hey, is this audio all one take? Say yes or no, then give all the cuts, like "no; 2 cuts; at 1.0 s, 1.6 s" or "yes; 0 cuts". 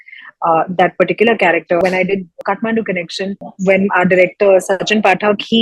no; 1 cut; at 1.8 s